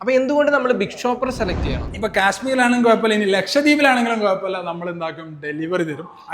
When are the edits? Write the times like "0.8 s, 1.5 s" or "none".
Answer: 2.0 s